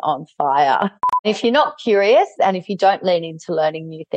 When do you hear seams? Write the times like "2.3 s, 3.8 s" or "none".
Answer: 1.2 s, 2.3 s